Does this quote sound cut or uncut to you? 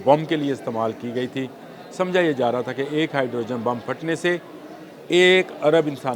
uncut